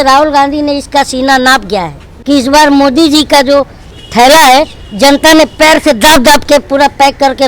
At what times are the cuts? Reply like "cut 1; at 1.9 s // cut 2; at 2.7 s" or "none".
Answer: cut 1; at 2.1 s